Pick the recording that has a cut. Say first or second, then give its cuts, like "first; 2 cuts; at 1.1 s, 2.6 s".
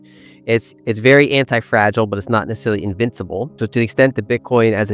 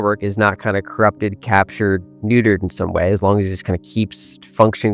first; 1 cut; at 3.5 s